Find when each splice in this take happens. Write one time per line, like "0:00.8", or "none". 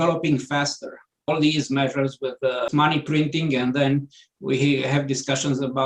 0:01.3
0:02.7